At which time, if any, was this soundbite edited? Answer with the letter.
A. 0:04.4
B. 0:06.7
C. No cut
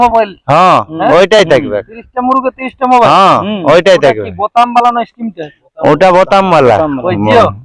C